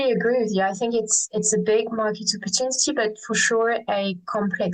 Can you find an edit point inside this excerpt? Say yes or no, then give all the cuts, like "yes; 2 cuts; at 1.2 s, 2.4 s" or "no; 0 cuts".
no; 0 cuts